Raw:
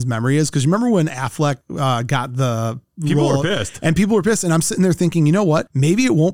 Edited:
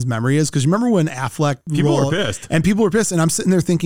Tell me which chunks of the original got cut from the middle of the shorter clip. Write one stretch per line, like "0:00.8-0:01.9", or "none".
0:01.6-0:02.9